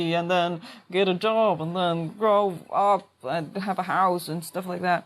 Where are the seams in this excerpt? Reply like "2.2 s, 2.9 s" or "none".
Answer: none